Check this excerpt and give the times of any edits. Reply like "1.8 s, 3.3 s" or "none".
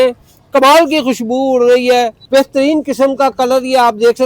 2.2 s